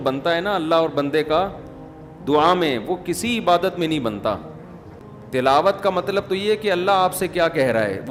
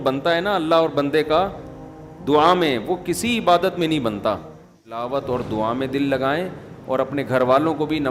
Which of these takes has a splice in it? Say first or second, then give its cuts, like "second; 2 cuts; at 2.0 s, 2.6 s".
second; 1 cut; at 5.0 s